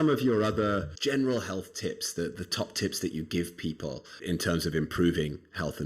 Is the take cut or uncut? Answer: cut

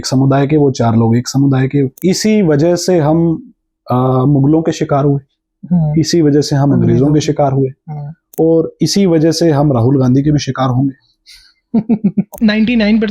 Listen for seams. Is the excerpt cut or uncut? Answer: cut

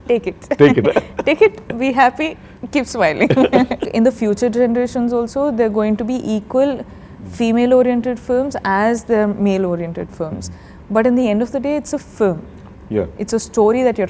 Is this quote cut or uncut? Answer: cut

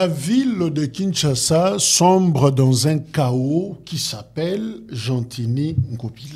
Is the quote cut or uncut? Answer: uncut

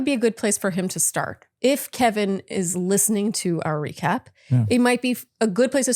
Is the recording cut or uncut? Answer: uncut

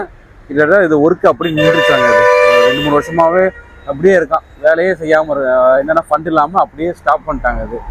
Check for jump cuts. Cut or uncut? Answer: uncut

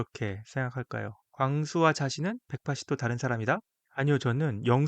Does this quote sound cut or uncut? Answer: cut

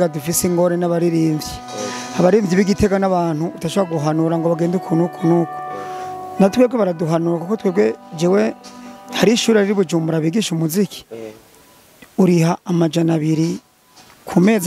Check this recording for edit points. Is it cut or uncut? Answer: uncut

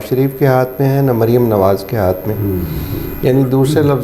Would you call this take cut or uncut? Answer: uncut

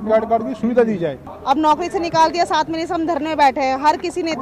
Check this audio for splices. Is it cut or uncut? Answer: cut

